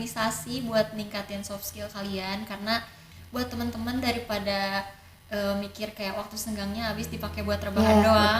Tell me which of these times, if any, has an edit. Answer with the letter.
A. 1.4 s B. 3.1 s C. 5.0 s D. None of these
B